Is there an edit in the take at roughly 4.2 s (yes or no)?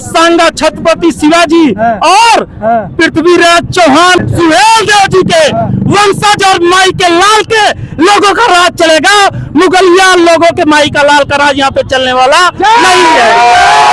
yes